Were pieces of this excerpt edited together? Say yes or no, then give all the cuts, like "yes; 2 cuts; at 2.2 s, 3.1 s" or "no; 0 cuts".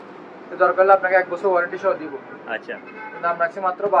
no; 0 cuts